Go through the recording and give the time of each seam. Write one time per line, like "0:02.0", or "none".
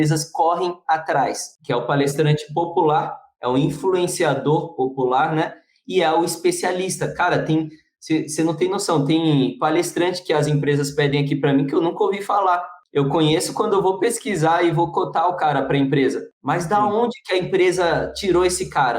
none